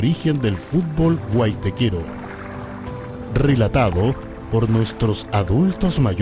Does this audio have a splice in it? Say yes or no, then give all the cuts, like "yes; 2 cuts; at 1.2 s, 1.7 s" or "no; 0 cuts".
yes; 2 cuts; at 2.0 s, 3.3 s